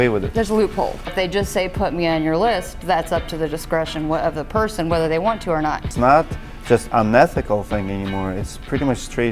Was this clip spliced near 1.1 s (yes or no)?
yes